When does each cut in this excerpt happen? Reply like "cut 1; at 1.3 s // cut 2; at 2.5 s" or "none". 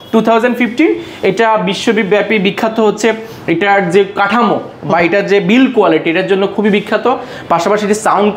none